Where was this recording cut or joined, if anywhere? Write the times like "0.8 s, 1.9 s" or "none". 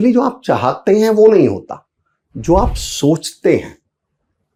none